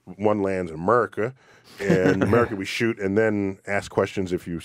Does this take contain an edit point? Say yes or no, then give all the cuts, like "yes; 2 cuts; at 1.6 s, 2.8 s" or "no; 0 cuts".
yes; 1 cut; at 1.8 s